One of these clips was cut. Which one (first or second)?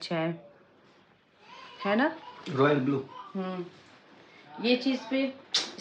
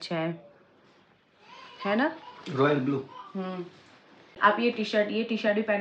second